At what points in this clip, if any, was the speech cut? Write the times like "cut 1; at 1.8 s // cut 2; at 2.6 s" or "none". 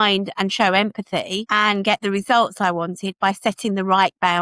none

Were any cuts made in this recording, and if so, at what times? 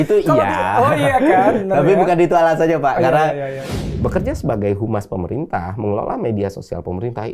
cut 1; at 3.6 s

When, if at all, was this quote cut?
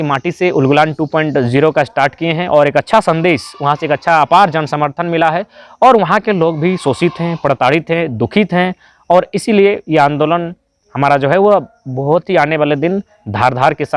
none

